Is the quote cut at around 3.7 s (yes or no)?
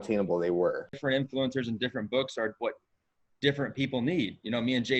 no